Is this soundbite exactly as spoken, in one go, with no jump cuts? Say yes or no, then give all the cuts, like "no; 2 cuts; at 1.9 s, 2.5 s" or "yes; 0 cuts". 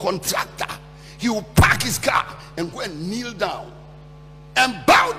yes; 0 cuts